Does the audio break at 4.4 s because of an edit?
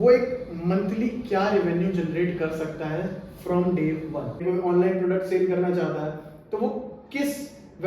yes; 1 cut; at 4.4 s

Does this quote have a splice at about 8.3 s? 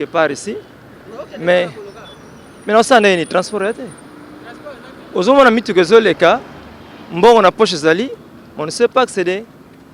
no; 0 cuts

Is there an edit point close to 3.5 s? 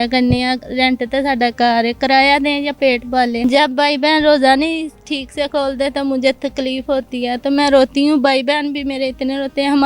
yes; 1 cut; at 3.5 s

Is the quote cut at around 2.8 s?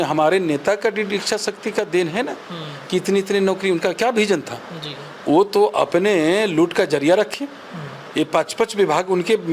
no; 0 cuts

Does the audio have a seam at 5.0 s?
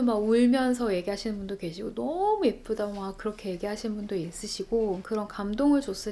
yes; 1 cut; at 5.0 s

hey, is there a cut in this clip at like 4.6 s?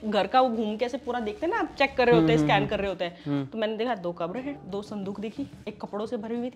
yes; 2 cuts; at 4.6 s, 5.6 s

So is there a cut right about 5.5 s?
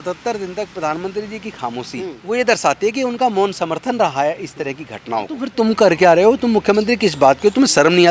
yes; 2 cuts; at 2.2 s, 5.5 s

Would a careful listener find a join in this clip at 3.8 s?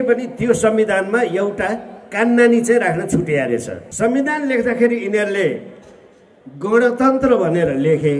yes; 1 cut; at 3.8 s

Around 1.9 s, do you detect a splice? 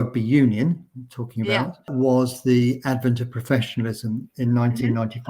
yes; 1 cut; at 1.9 s

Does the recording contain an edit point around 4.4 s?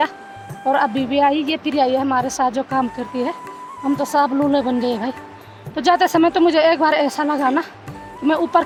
no; 0 cuts

